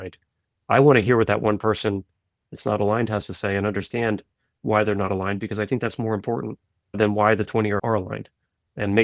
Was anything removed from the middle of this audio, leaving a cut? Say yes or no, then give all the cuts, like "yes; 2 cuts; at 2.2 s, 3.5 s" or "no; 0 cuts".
yes; 2 cuts; at 7.0 s, 7.8 s